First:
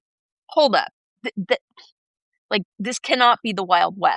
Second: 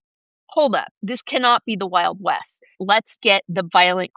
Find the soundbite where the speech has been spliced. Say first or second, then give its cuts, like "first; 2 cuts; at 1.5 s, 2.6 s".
second; 2 cuts; at 1.0 s, 2.7 s